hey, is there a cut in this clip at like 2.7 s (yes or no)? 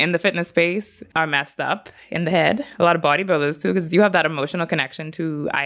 no